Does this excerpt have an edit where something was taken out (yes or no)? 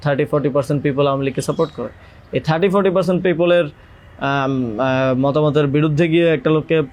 no